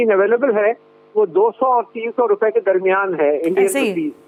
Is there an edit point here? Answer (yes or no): no